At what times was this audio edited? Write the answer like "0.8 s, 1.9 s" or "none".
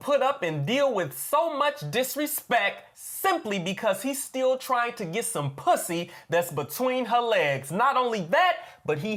none